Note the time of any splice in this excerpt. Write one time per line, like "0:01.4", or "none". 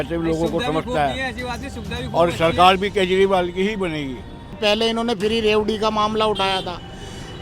0:04.6